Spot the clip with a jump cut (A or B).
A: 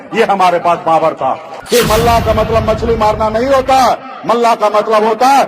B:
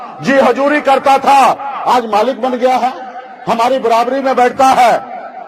A